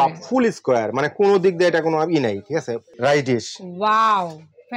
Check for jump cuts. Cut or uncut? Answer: cut